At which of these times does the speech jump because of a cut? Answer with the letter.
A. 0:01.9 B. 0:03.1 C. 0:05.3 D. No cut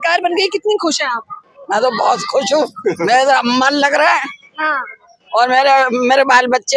D